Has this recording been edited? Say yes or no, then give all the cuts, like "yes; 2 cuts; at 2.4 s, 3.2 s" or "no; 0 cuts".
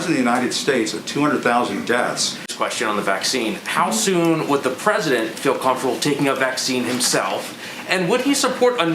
yes; 1 cut; at 2.5 s